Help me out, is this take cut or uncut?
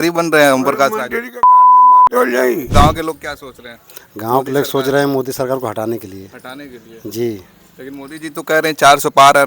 cut